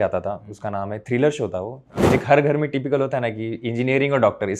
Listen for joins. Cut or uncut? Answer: cut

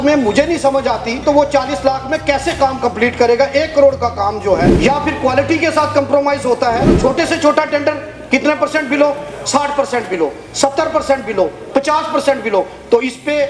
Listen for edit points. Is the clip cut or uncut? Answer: cut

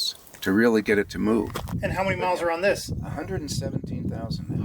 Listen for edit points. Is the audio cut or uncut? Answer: cut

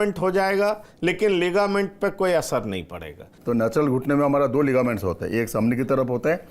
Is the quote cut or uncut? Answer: cut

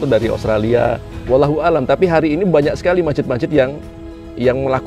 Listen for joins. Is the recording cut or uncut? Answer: cut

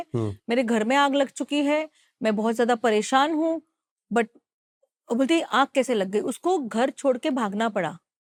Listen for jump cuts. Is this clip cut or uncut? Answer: uncut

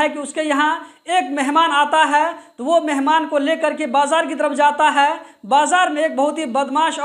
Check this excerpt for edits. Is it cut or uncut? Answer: uncut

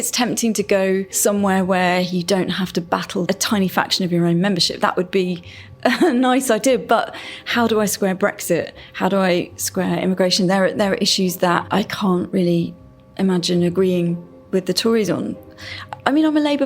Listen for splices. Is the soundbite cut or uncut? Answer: cut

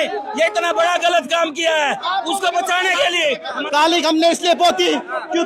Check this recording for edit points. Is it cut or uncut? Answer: cut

